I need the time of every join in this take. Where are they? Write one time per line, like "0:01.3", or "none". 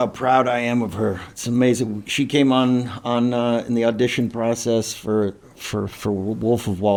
none